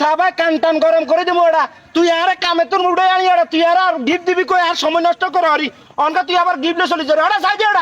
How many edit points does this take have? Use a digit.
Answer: 0